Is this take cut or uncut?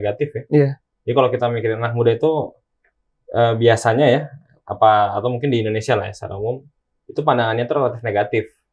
uncut